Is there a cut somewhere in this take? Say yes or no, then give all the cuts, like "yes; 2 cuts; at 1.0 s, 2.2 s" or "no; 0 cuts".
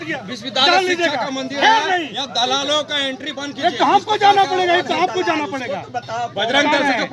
no; 0 cuts